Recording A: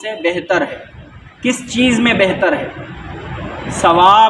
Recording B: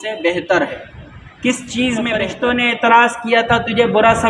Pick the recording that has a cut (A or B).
B